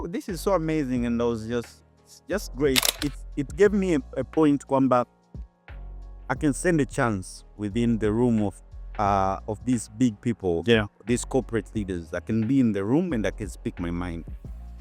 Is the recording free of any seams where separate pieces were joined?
yes; 0 cuts

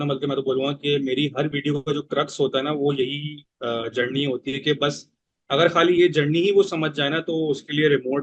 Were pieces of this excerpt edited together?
no; 0 cuts

